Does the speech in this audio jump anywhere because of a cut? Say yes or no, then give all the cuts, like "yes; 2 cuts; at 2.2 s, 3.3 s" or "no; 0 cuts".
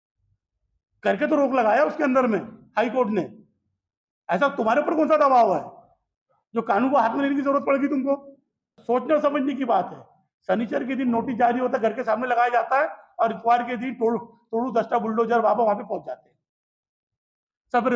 yes; 1 cut; at 8.8 s